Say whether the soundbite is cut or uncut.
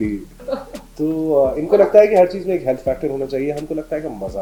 uncut